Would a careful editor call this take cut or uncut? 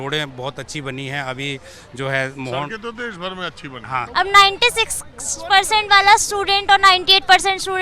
cut